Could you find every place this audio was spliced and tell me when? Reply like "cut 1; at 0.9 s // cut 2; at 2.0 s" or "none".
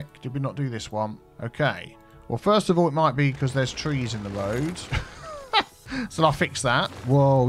none